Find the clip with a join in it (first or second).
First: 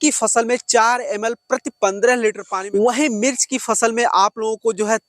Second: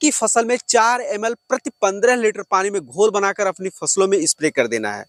first